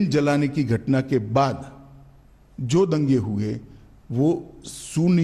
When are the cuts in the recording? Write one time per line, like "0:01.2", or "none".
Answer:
none